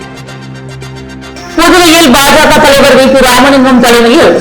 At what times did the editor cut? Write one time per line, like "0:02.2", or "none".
0:01.0